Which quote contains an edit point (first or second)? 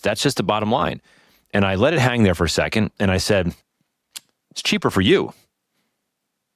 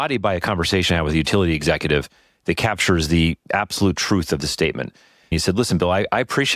second